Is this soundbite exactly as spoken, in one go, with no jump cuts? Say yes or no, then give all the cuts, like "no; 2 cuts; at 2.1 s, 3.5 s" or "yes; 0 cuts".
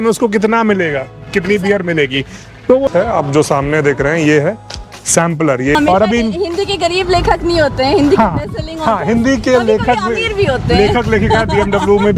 no; 2 cuts; at 2.9 s, 5.8 s